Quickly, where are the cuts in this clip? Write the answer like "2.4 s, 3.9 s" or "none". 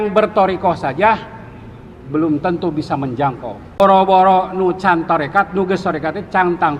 3.8 s